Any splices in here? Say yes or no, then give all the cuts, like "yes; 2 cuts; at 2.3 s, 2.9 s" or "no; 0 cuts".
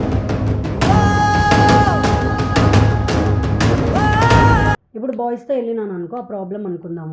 yes; 1 cut; at 4.9 s